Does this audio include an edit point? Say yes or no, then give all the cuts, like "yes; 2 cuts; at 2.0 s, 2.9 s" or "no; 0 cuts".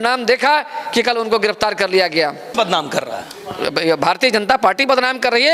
yes; 1 cut; at 2.5 s